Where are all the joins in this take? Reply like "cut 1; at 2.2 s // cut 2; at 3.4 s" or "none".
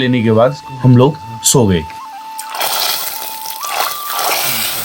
none